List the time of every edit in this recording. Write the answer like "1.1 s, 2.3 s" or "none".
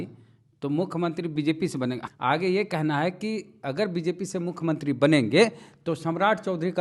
2.0 s

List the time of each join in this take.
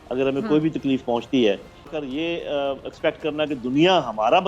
1.9 s

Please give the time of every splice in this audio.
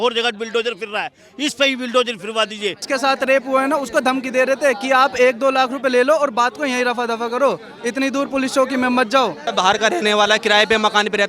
2.8 s, 9.4 s

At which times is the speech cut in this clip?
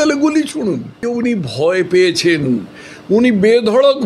1.1 s

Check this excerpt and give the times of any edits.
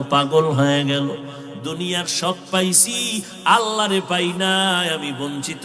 none

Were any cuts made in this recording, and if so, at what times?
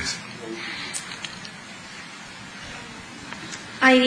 2.4 s

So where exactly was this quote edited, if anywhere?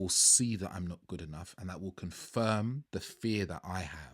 2.8 s

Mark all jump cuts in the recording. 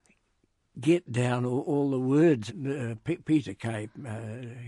2.5 s

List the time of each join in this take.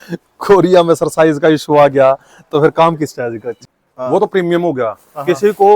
3.6 s

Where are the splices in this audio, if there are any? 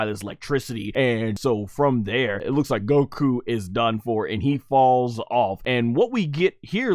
1.1 s, 2.4 s, 5.6 s

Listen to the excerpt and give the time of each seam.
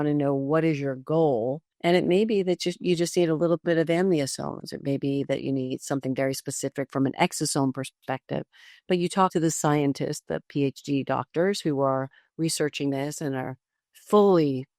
1.7 s, 9.3 s

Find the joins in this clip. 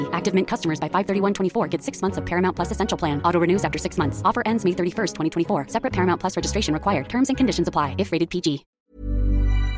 8.7 s

